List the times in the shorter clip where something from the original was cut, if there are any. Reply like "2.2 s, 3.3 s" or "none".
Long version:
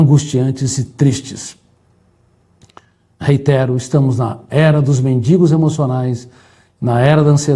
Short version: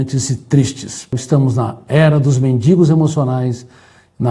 1.2 s